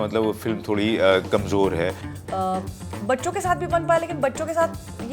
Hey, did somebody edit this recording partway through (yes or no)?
yes